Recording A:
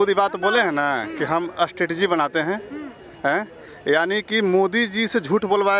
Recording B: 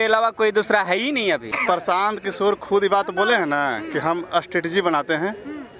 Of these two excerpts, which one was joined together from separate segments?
B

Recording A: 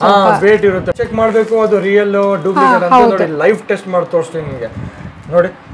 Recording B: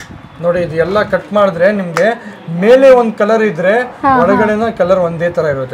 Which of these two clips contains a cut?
A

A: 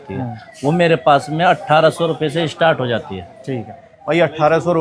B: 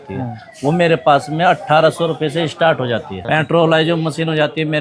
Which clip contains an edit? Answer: B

